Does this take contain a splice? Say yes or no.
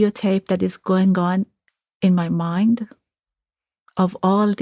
no